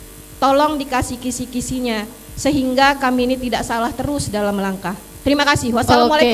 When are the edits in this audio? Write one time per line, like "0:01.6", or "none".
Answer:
none